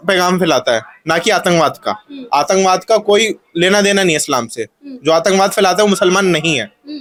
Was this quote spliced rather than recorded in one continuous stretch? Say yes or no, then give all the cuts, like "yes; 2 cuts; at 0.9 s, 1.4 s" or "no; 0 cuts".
no; 0 cuts